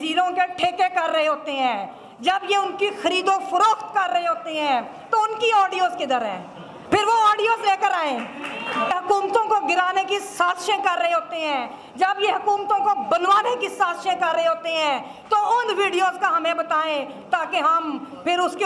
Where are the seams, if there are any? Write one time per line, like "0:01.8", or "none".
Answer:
0:08.9